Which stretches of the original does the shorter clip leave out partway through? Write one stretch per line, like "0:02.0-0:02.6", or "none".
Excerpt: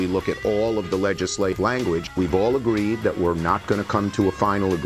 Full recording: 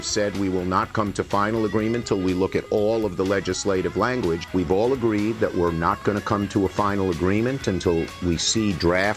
0:03.8-0:03.9